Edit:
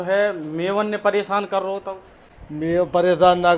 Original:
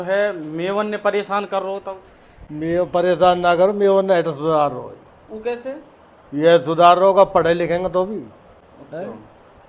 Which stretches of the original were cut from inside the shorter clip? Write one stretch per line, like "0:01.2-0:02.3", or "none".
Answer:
none